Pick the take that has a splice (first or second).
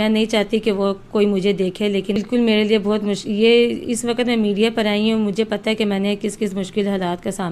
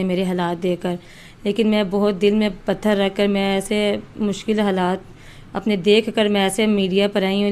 first